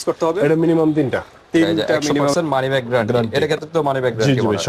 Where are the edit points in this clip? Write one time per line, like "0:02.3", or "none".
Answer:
0:01.9